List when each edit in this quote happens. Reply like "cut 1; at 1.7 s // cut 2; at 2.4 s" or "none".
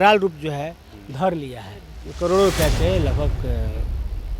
cut 1; at 2.0 s